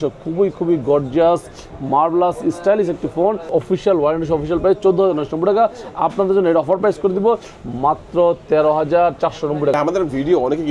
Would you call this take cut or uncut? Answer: cut